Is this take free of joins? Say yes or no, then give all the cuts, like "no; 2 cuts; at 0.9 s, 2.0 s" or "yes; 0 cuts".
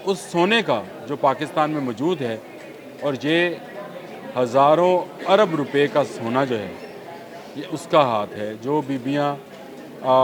yes; 0 cuts